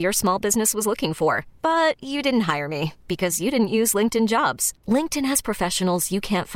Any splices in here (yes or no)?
no